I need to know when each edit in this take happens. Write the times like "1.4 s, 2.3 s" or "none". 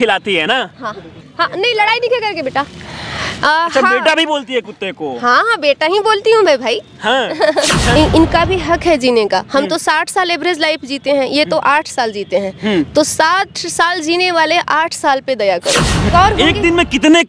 1.2 s, 8.0 s, 16.1 s